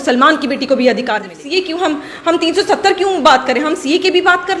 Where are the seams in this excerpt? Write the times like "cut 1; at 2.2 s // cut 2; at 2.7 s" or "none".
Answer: cut 1; at 1.3 s